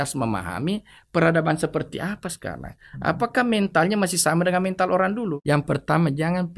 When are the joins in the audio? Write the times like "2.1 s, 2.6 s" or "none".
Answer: 5.4 s